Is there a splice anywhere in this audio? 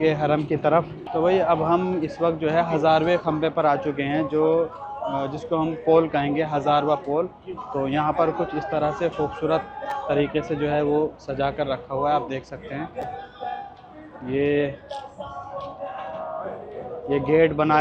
yes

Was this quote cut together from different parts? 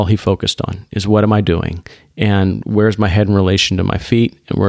no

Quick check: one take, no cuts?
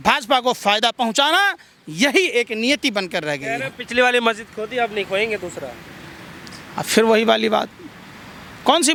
yes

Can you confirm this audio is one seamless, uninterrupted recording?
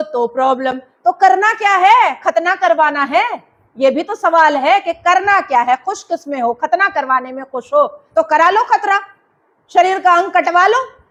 yes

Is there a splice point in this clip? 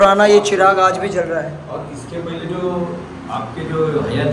no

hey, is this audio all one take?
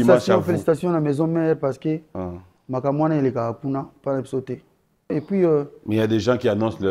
no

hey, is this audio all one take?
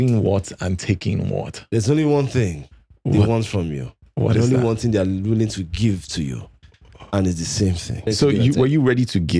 no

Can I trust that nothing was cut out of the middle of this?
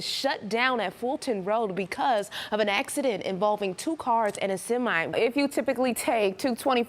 no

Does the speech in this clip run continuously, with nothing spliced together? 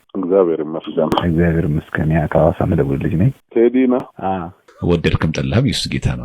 no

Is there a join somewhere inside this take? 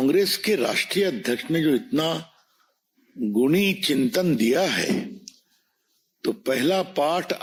no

